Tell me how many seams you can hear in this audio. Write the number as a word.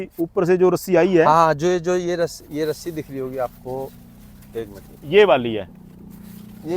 zero